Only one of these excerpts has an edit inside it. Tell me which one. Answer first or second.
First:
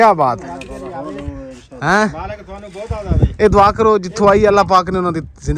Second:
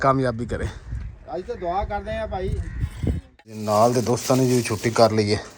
second